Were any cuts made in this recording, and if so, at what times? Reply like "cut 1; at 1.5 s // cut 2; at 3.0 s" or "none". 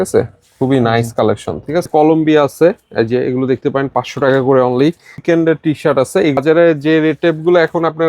cut 1; at 1.9 s // cut 2; at 5.2 s // cut 3; at 6.4 s